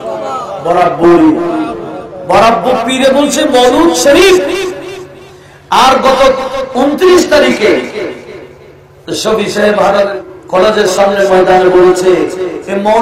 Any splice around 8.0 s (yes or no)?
no